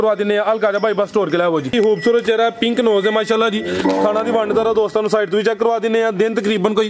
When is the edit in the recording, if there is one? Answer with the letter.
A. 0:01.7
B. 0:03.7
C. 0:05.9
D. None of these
A